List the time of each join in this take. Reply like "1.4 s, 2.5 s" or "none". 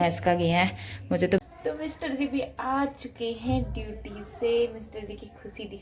1.4 s